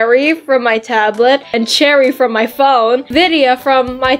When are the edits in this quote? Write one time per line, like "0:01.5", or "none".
0:03.1